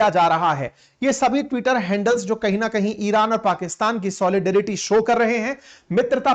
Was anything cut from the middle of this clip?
no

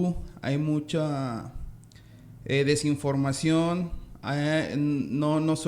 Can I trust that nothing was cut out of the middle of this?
yes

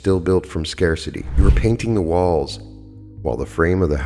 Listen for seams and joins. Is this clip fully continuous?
no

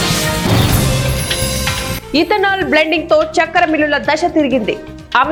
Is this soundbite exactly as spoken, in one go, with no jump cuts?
yes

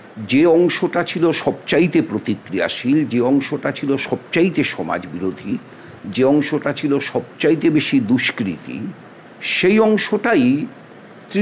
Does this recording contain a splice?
no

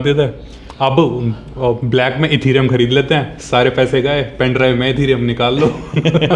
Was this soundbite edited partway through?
no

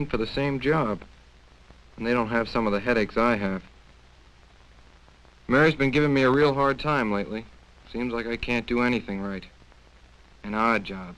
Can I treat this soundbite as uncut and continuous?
yes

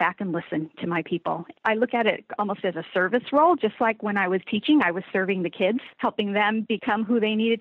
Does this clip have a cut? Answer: yes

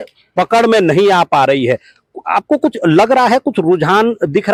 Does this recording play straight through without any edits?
yes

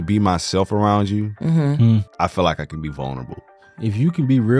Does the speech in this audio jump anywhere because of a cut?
yes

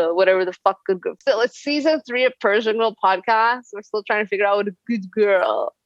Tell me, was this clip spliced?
yes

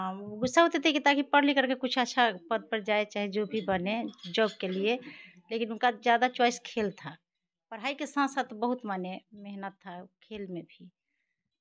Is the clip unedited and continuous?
yes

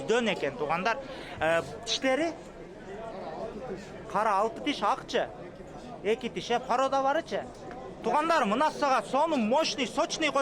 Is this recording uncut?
no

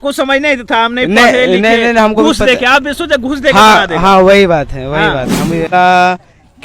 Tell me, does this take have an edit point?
yes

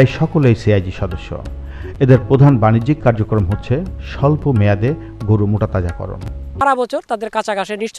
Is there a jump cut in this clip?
yes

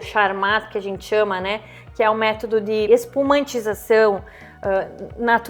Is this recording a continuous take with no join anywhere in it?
yes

